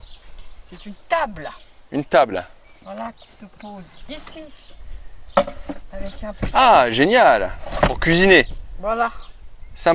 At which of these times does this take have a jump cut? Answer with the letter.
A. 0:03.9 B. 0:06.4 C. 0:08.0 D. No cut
D